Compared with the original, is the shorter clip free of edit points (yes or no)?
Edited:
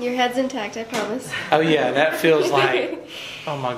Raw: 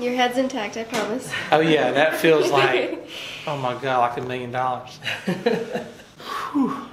yes